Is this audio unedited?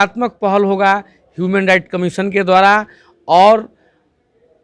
yes; 0 cuts

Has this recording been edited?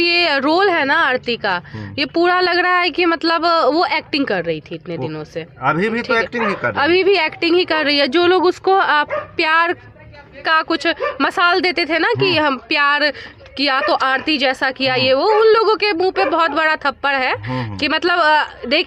no; 0 cuts

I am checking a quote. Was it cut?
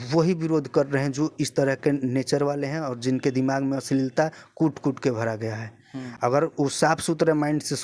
no; 0 cuts

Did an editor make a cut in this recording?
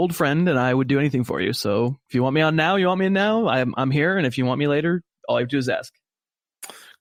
no; 0 cuts

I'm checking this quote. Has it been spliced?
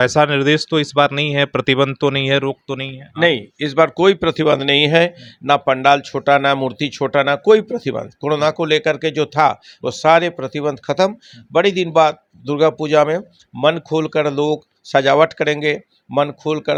no; 0 cuts

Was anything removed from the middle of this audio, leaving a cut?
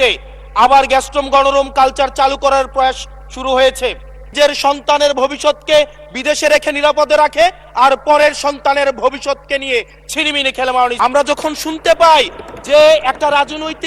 yes; 2 cuts; at 4.3 s, 10.9 s

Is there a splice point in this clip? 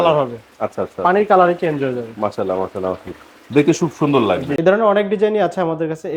yes; 1 cut; at 4.6 s

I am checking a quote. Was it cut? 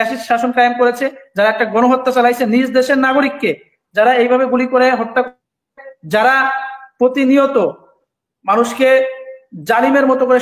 no; 0 cuts

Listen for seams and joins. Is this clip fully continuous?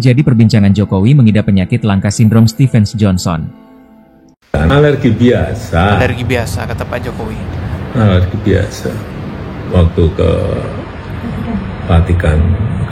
no; 1 cut; at 4.4 s

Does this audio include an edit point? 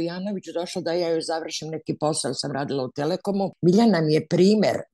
yes; 1 cut; at 3.5 s

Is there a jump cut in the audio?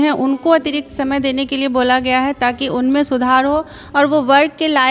no; 0 cuts

